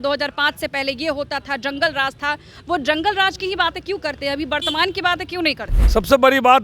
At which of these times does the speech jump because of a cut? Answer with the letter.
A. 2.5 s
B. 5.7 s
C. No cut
B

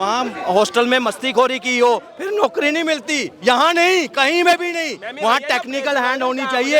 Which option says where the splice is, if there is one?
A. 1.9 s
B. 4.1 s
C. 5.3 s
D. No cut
D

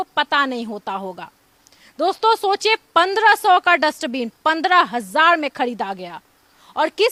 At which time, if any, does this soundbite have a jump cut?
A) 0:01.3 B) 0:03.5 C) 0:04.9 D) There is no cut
D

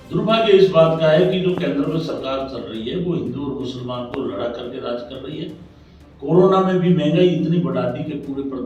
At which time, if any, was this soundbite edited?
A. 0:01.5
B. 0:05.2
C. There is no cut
C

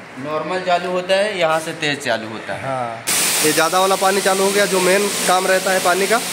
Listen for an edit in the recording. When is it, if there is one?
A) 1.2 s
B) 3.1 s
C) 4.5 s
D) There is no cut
B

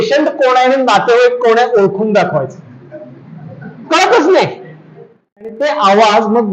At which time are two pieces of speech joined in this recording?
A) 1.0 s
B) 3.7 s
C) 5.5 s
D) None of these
C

